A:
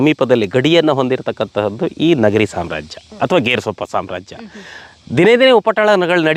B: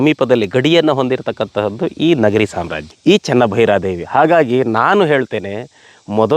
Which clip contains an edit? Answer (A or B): B